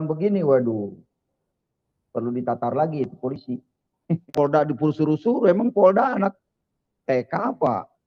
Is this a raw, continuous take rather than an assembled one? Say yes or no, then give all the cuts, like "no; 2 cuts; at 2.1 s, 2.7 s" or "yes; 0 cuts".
no; 1 cut; at 4.3 s